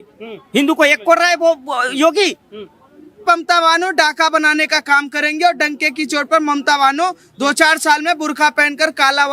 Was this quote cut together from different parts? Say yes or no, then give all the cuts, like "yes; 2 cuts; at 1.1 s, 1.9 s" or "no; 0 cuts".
yes; 1 cut; at 3.2 s